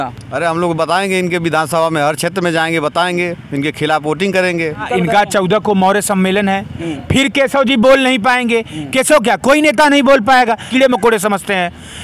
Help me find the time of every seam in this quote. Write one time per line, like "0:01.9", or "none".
0:04.8
0:10.6